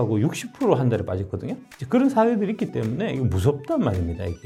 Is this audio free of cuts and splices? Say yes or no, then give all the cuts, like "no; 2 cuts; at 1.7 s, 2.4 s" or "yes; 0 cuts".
yes; 0 cuts